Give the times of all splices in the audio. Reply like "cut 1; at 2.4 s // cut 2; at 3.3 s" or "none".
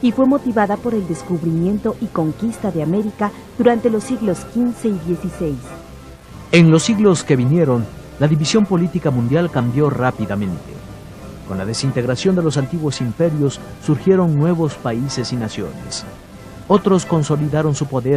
cut 1; at 3.5 s